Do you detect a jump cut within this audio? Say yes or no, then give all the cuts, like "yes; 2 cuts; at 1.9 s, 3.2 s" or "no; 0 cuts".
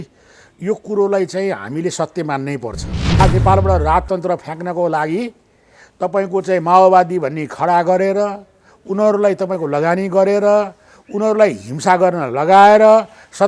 yes; 1 cut; at 3.2 s